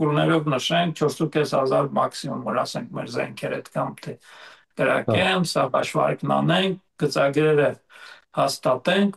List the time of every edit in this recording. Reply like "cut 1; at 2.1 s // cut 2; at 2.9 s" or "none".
none